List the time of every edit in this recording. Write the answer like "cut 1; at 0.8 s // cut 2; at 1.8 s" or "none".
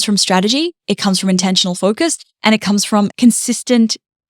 cut 1; at 3.1 s